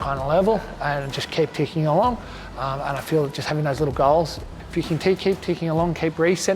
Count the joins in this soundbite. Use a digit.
1